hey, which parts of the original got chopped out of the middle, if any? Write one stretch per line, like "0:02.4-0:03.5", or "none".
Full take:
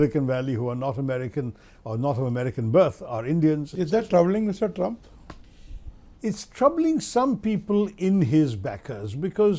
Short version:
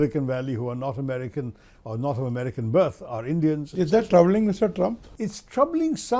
0:05.1-0:06.1